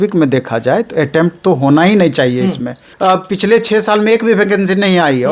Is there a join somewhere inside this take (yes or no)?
yes